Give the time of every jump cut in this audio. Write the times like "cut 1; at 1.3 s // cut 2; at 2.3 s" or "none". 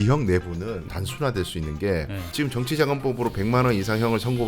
cut 1; at 0.9 s // cut 2; at 2.2 s